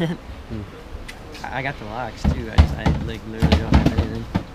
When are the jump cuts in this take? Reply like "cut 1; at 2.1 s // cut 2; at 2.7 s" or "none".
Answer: none